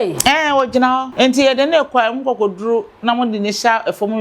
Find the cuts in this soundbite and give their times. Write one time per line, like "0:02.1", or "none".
0:01.1